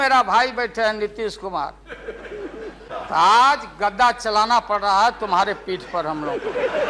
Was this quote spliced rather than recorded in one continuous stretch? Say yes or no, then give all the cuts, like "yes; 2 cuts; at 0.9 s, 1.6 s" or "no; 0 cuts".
yes; 1 cut; at 2.8 s